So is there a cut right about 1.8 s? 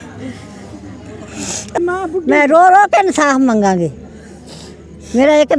yes; 1 cut; at 1.8 s

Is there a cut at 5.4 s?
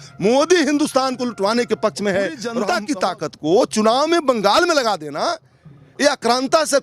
no; 1 cut; at 2.5 s

